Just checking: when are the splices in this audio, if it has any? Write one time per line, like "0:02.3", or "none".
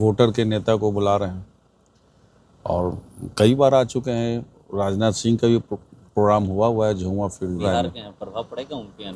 0:07.6